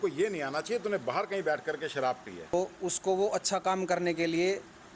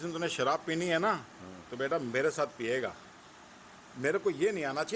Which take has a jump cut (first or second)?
first